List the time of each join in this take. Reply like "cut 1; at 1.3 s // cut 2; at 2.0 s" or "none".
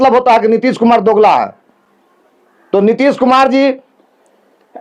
none